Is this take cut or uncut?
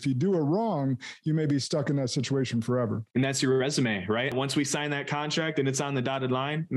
cut